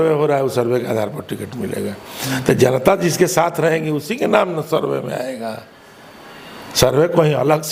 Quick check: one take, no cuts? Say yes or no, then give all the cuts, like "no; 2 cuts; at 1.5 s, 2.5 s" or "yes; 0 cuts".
yes; 0 cuts